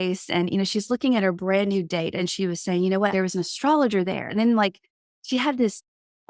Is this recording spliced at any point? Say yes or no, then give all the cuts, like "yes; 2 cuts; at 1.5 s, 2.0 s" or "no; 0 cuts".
yes; 3 cuts; at 2.2 s, 3.1 s, 4.3 s